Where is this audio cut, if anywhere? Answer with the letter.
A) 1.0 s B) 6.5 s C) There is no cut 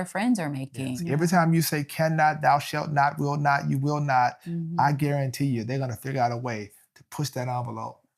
A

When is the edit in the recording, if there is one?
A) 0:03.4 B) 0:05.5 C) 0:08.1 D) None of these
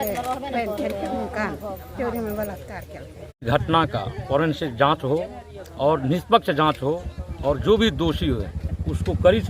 A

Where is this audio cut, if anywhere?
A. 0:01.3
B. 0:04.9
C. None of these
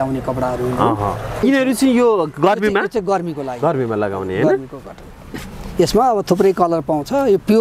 A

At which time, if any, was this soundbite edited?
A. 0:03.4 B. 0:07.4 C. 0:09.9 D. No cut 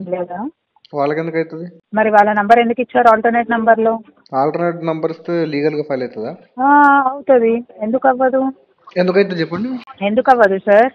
C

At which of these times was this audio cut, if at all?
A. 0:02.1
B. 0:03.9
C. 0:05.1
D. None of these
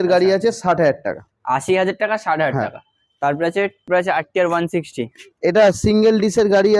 B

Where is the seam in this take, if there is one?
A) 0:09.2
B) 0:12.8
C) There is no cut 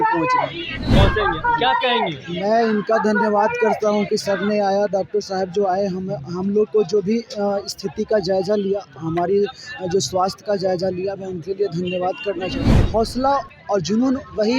B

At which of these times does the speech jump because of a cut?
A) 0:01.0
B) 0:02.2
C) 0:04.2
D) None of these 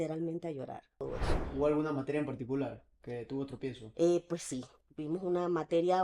A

